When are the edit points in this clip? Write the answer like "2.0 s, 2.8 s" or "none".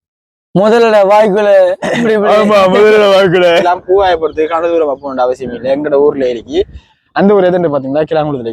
3.6 s